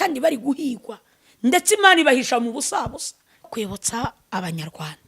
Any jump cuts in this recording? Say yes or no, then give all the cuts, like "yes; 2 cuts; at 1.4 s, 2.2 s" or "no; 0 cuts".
yes; 1 cut; at 3.5 s